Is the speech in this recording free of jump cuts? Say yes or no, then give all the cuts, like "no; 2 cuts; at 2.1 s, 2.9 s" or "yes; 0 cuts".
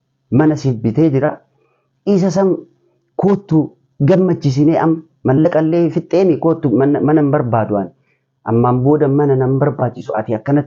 yes; 0 cuts